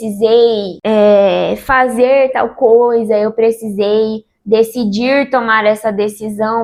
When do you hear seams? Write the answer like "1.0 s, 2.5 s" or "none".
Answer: none

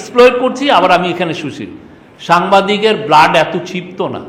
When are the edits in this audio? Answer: none

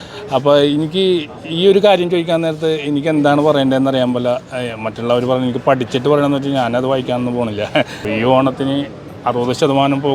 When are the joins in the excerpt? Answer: 8.0 s

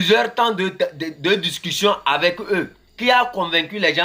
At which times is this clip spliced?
2.8 s

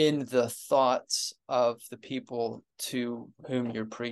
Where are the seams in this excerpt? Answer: 2.7 s

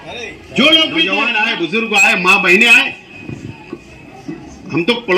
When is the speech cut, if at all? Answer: 1.2 s

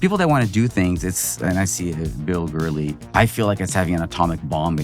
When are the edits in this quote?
3.0 s

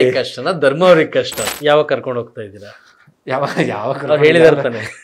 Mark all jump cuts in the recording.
1.4 s

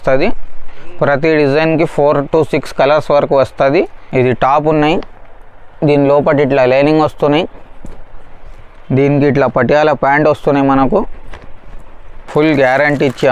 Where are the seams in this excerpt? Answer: 4.0 s, 12.0 s

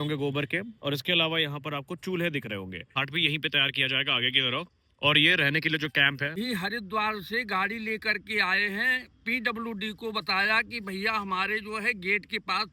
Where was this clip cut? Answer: 3.0 s, 6.3 s

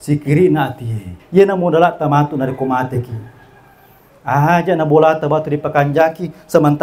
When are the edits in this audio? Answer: 1.2 s

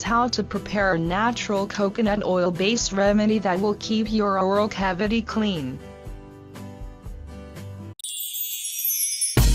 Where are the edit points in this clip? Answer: none

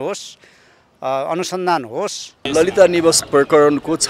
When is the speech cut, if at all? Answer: 2.5 s

